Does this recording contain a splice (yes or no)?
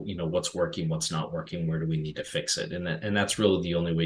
no